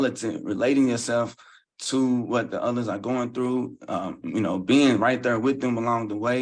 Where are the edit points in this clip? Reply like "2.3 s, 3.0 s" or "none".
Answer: none